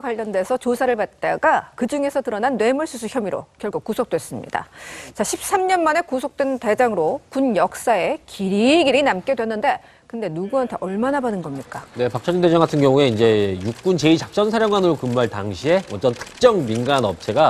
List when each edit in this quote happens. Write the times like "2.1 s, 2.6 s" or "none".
none